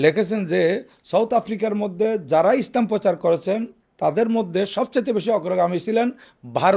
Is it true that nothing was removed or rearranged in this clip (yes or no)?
yes